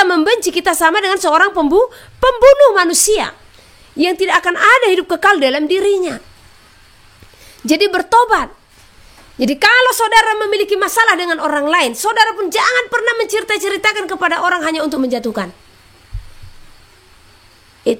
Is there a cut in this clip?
no; 0 cuts

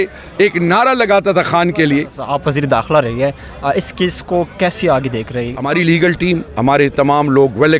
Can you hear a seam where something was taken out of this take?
yes; 2 cuts; at 2.3 s, 5.5 s

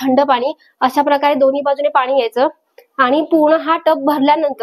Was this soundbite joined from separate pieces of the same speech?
no; 0 cuts

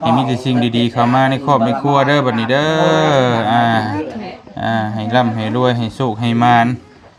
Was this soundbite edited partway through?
no; 0 cuts

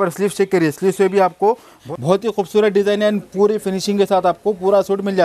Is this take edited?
yes; 1 cut; at 1.7 s

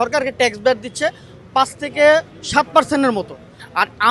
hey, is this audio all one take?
yes; 0 cuts

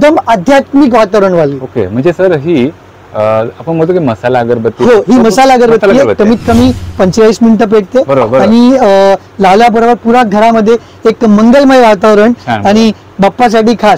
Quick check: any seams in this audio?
no; 0 cuts

